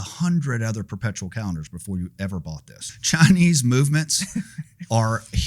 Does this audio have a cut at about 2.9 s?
yes; 1 cut; at 2.9 s

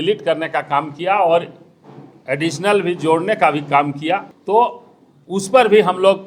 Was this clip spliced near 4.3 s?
yes; 1 cut; at 4.3 s

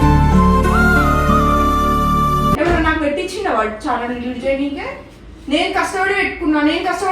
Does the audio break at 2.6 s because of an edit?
yes; 1 cut; at 2.6 s

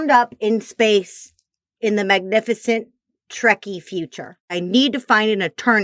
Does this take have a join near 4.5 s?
yes; 1 cut; at 4.5 s

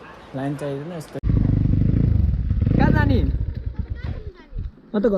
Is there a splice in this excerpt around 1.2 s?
yes; 1 cut; at 1.2 s

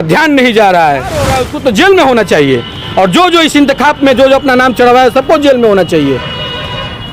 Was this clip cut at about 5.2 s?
no; 1 cut; at 1.4 s

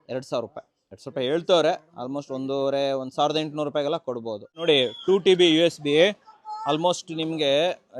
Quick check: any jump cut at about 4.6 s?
yes; 1 cut; at 4.6 s

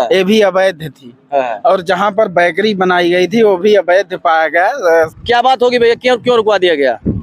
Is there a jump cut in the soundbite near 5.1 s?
yes; 1 cut; at 5.1 s

